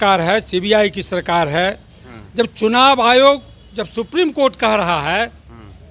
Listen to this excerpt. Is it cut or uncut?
uncut